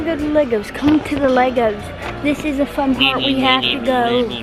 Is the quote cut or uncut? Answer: uncut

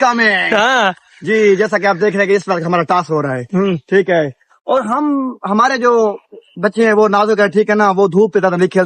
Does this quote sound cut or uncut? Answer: uncut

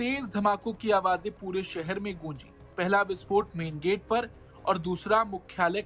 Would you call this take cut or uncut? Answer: uncut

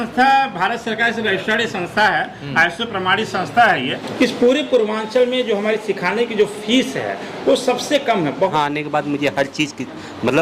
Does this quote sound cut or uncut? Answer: cut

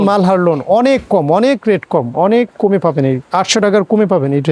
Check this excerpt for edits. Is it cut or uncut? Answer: uncut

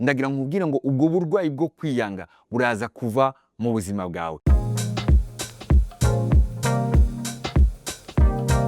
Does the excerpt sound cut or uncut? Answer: cut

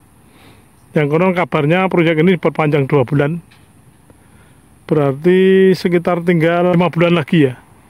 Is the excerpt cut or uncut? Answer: cut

